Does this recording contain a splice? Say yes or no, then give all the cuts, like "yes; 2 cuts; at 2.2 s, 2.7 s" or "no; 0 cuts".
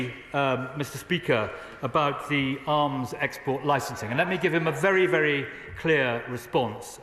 no; 0 cuts